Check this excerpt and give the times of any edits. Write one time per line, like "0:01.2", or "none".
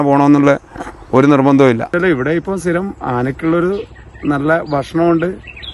0:01.9